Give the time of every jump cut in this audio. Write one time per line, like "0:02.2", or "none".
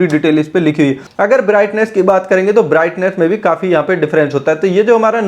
0:01.0